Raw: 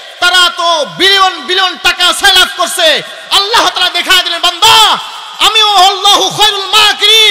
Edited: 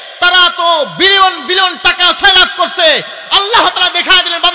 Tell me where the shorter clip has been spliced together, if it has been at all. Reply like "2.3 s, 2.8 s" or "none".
none